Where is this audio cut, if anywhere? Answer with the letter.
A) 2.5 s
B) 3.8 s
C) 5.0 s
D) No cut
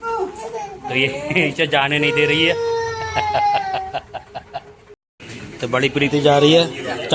C